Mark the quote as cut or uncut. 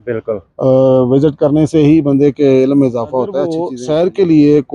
cut